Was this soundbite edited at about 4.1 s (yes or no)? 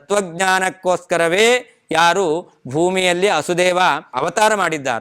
yes